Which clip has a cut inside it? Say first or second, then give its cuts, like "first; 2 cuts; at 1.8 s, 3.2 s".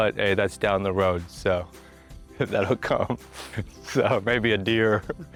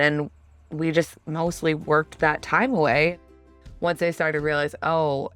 second; 1 cut; at 3.2 s